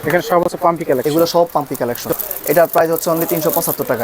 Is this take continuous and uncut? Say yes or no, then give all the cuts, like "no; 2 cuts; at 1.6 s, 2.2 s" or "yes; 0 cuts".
no; 1 cut; at 2.1 s